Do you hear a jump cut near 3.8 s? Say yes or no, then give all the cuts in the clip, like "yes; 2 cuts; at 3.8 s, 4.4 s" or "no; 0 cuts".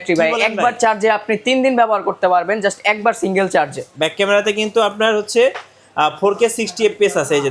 yes; 1 cut; at 3.8 s